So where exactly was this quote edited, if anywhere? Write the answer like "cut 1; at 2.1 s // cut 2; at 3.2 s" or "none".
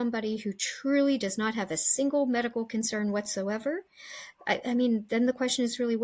none